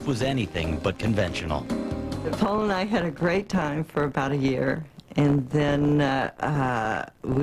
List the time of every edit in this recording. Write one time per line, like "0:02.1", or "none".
0:04.9